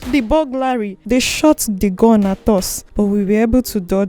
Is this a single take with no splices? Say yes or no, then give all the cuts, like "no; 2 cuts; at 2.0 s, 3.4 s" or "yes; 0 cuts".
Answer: no; 2 cuts; at 1.0 s, 2.8 s